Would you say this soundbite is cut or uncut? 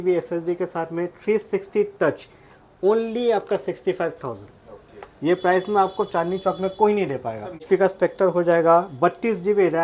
cut